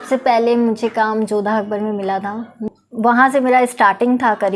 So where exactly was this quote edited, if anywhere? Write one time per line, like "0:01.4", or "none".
0:02.6

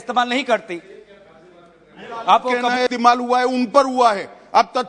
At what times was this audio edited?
0:02.9

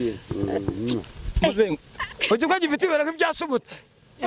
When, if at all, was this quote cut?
0:02.2

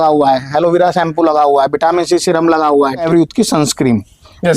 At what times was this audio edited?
0:03.0

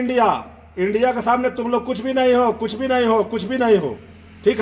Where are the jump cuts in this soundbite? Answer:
none

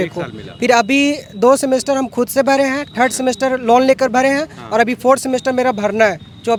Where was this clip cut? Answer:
none

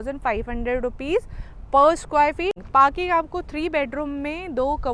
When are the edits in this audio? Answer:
0:02.6

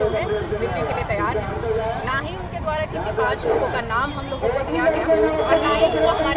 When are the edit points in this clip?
none

